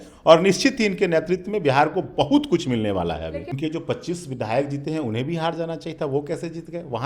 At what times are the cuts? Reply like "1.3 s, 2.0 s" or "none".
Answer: 3.6 s